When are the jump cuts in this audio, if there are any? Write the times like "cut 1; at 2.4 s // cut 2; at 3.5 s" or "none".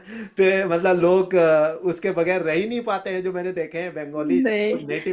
none